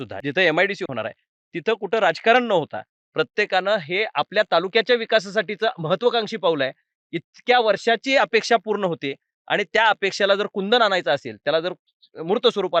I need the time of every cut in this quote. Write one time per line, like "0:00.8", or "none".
none